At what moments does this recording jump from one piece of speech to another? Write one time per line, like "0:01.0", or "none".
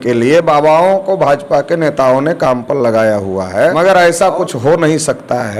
0:03.7